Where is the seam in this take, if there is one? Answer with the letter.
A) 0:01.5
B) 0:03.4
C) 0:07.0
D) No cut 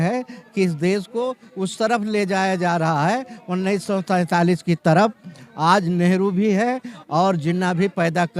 D